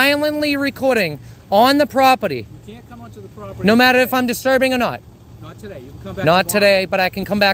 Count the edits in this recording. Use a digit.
0